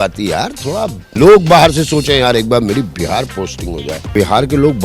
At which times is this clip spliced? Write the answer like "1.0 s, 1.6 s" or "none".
1.1 s, 4.1 s